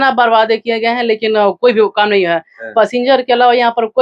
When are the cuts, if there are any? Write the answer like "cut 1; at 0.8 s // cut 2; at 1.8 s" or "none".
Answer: none